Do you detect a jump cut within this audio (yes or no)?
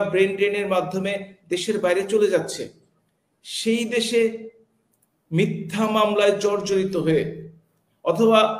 no